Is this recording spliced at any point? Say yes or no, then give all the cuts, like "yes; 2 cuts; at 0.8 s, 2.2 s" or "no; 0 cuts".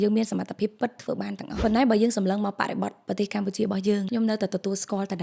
yes; 2 cuts; at 1.6 s, 4.1 s